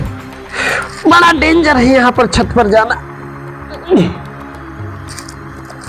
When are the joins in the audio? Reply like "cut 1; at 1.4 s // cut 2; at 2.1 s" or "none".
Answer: none